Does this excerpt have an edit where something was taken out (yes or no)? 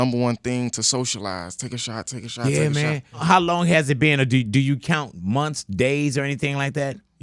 yes